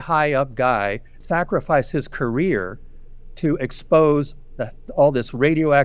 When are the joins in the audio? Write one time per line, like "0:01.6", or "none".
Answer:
0:01.1